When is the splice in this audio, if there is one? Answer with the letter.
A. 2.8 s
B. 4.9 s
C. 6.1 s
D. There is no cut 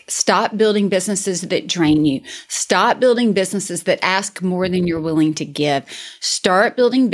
D